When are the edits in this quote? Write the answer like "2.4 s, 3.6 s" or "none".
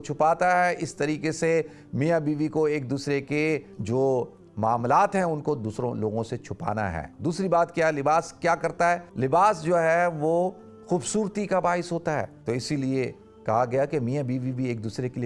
3.7 s, 7.1 s, 9.1 s, 12.3 s